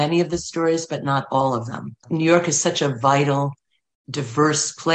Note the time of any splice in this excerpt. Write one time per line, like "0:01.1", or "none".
0:02.0